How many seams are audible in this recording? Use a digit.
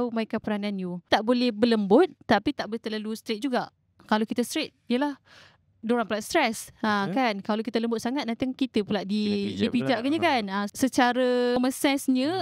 3